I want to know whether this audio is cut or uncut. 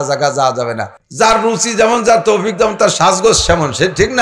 cut